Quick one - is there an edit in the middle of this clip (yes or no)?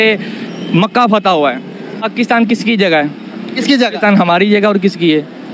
yes